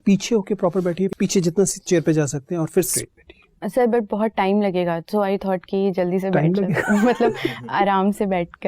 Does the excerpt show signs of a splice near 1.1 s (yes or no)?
yes